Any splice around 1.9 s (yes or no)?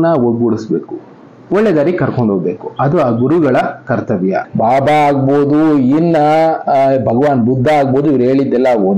no